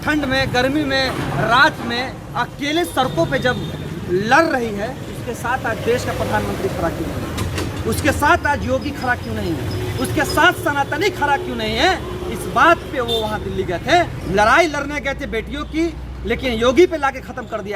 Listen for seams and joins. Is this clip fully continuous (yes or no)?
no